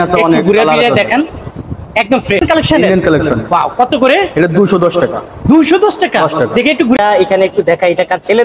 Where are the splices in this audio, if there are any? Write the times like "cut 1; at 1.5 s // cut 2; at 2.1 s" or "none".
cut 1; at 2.4 s // cut 2; at 7.0 s